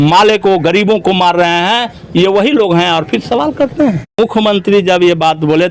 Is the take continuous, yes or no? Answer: no